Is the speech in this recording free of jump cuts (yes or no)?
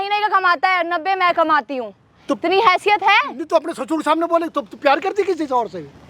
yes